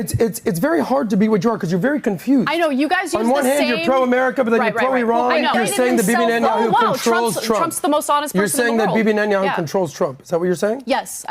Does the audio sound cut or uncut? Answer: cut